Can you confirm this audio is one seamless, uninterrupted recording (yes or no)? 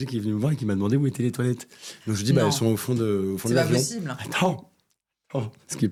yes